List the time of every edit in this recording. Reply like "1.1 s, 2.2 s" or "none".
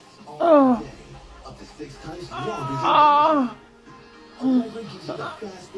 none

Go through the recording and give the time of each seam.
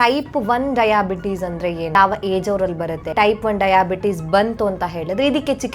1.9 s, 3.1 s

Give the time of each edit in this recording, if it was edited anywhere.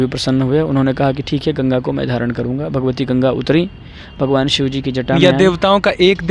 5.2 s

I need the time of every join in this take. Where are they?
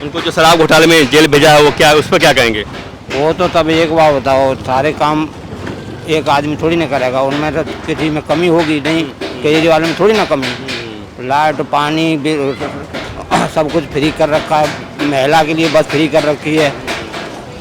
none

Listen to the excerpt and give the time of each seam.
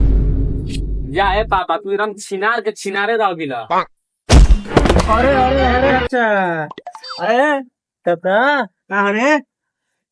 4.0 s

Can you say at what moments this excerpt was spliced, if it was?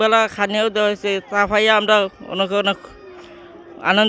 none

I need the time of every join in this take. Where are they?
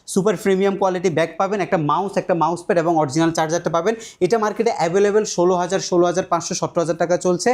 none

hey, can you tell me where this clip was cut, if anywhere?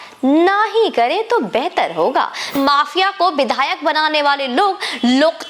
2.6 s

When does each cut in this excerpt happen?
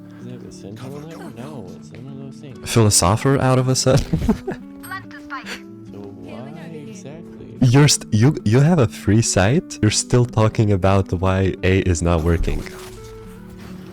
9.7 s, 11.6 s

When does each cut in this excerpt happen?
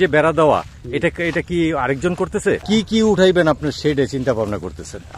2.6 s

